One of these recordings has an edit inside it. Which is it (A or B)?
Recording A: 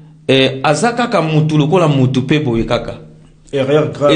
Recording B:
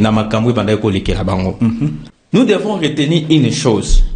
B